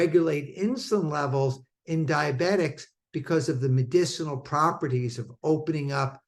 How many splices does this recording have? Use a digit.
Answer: 0